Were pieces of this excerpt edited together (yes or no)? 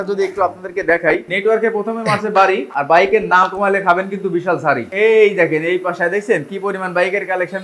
no